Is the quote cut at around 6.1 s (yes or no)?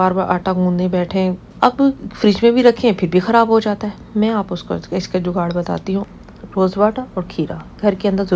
yes